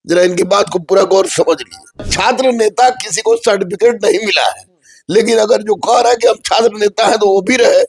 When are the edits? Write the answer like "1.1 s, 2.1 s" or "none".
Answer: 2.1 s